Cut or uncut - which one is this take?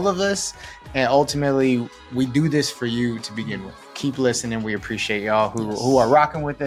uncut